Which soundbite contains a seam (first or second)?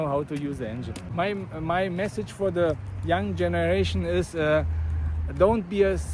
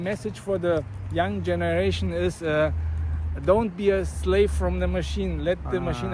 first